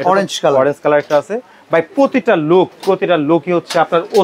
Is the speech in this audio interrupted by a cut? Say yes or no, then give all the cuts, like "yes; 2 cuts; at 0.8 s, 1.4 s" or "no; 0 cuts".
no; 0 cuts